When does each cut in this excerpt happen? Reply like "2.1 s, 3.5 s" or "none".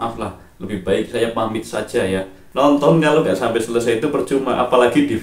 2.4 s